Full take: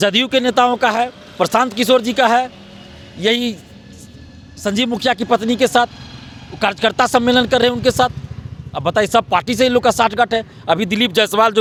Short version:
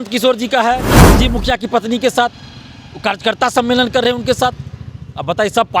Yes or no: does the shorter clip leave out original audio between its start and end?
yes